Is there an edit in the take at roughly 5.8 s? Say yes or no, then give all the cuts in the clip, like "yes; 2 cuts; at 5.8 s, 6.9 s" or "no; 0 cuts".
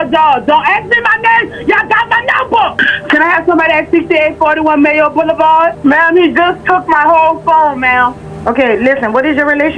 yes; 3 cuts; at 2.8 s, 5.8 s, 8.3 s